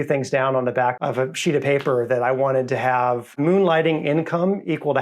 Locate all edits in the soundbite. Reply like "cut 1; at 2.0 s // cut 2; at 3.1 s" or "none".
cut 1; at 1.0 s // cut 2; at 3.4 s